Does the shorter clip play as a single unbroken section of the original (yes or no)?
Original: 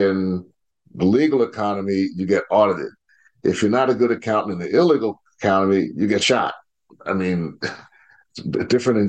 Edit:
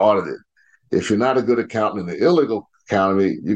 yes